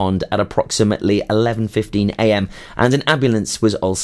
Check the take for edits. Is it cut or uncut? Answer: uncut